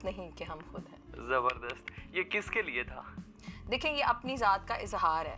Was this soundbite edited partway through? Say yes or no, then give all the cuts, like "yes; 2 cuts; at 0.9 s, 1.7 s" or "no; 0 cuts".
no; 0 cuts